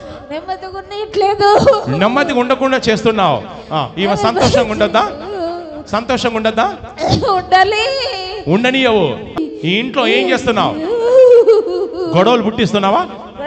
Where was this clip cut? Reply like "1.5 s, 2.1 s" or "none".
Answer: 9.4 s

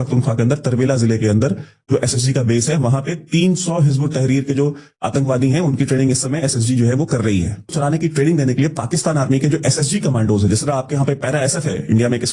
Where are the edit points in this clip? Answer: 7.7 s

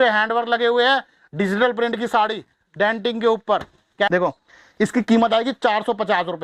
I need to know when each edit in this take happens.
4.1 s

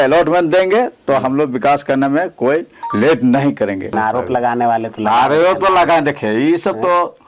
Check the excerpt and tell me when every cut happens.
3.9 s

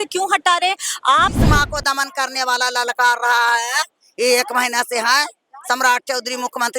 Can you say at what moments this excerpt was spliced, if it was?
1.4 s

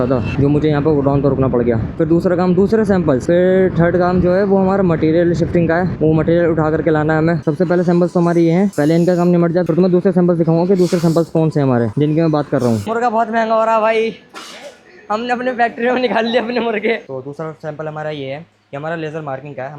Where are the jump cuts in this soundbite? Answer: 1.9 s, 7.4 s, 12.8 s, 17.0 s

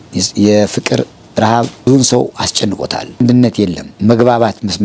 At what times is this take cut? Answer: 1.9 s, 3.2 s, 3.9 s

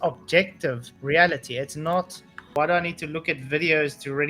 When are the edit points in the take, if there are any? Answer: 2.5 s

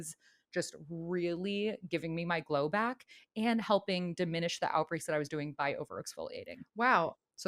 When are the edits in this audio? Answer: none

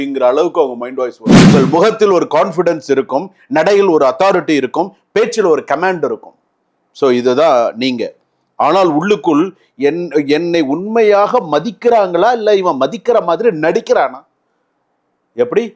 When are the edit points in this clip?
1.5 s

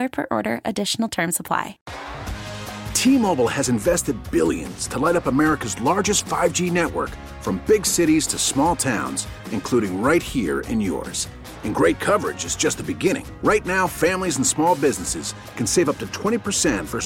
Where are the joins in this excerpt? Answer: 1.8 s

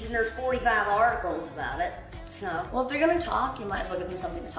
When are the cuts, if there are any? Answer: none

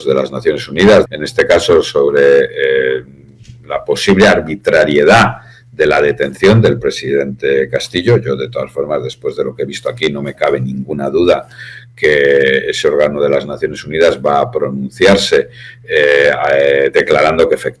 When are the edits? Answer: 1.1 s

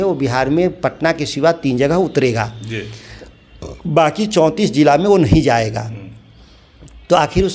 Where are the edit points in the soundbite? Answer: none

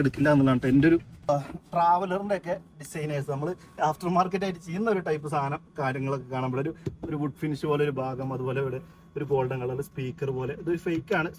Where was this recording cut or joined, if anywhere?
1.3 s

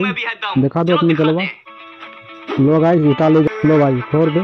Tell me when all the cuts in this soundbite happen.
3.5 s

